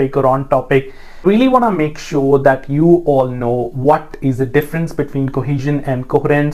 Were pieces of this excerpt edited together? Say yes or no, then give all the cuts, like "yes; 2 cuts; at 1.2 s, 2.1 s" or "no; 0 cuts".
yes; 1 cut; at 1.2 s